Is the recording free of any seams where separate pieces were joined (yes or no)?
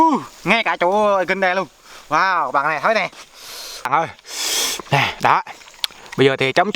no